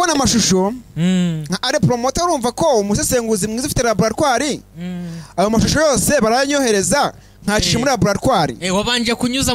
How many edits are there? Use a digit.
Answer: 0